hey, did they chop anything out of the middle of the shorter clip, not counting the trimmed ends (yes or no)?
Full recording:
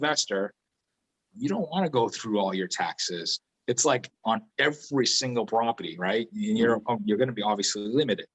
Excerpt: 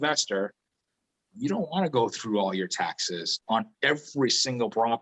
yes